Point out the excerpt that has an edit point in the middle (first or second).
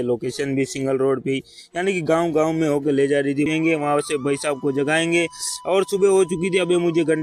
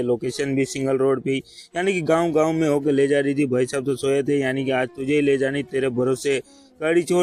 first